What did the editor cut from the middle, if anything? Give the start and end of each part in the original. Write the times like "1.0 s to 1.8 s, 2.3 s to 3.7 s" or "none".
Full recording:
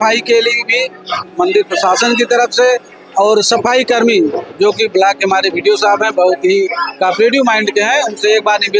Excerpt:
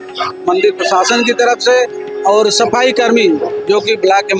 none